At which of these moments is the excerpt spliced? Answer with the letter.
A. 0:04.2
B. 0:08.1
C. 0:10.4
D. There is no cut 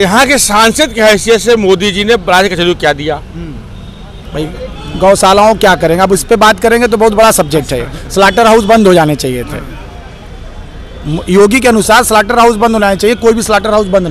A